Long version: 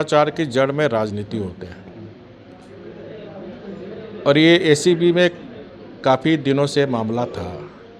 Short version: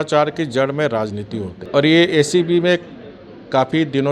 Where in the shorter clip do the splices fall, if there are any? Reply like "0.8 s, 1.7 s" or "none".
1.6 s